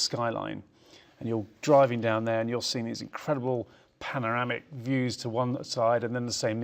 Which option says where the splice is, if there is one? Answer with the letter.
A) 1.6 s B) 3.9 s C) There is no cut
C